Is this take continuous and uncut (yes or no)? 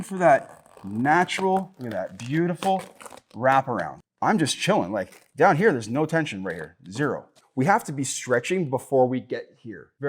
no